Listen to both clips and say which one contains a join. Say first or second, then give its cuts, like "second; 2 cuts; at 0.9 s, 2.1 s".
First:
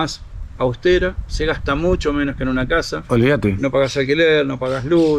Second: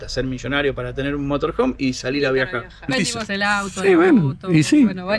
second; 1 cut; at 2.8 s